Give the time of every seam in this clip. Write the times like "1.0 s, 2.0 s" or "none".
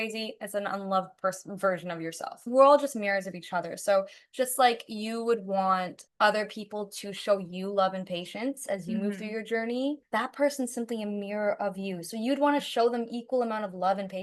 2.4 s, 6.0 s